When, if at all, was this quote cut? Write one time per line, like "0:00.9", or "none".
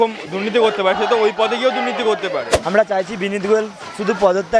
0:02.5